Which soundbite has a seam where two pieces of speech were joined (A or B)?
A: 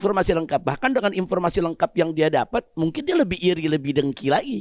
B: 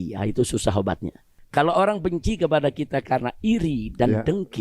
B